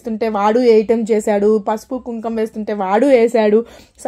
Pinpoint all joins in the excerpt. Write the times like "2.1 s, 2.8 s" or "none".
none